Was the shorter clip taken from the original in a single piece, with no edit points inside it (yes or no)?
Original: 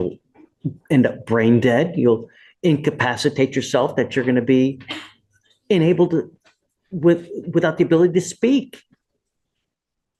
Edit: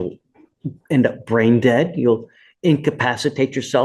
yes